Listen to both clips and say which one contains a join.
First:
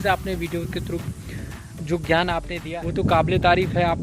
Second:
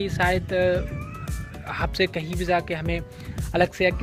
first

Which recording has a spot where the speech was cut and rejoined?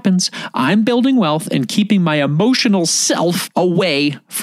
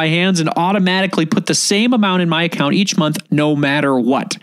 first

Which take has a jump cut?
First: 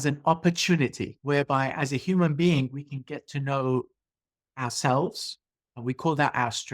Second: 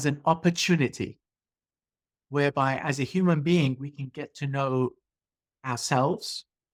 first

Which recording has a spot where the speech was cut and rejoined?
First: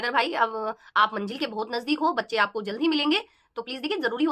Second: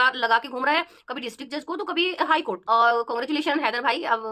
second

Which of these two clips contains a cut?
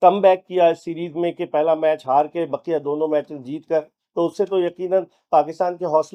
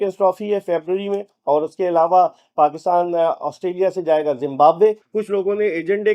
second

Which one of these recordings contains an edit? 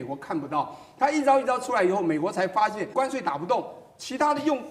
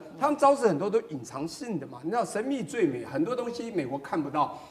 first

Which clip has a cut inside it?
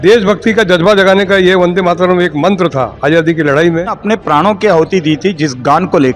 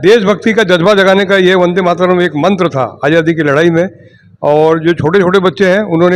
first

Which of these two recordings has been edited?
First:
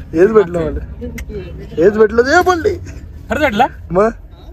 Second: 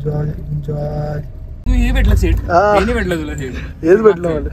second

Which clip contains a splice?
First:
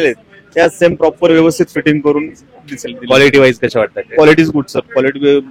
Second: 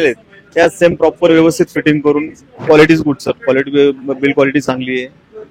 second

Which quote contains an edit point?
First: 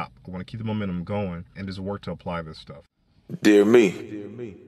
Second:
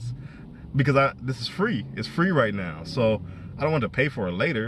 first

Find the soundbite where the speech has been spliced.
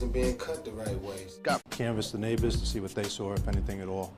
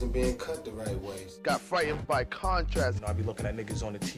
second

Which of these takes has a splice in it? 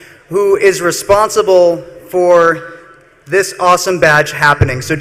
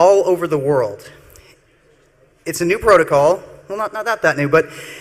first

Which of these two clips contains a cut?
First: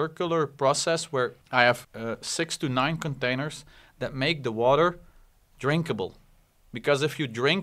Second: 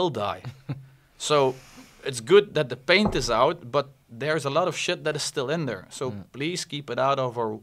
first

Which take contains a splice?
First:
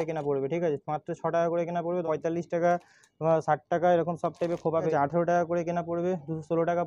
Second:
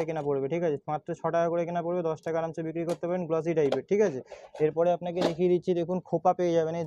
first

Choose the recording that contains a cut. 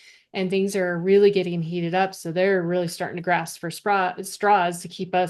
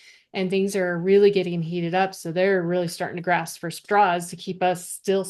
second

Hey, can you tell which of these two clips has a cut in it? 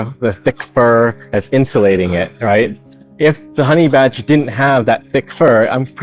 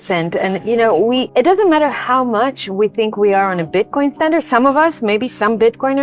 second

